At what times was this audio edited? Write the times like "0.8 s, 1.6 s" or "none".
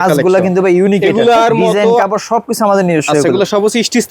2.0 s